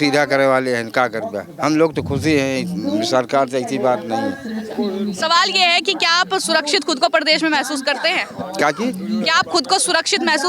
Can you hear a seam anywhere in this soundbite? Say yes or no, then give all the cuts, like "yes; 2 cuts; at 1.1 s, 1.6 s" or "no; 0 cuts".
no; 0 cuts